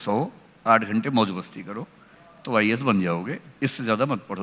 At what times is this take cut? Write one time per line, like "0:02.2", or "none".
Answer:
none